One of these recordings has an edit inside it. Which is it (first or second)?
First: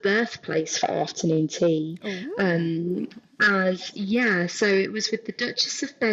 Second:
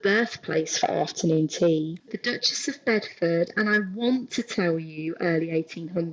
second